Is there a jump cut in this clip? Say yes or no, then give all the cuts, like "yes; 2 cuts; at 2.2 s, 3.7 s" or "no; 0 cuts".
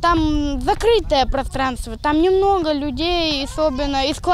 no; 0 cuts